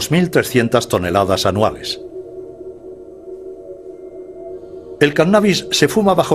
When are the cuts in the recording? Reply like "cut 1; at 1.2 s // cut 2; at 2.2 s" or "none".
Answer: cut 1; at 1.1 s